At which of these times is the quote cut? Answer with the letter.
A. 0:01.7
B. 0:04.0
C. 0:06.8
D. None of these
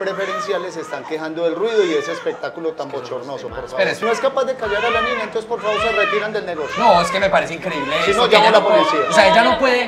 B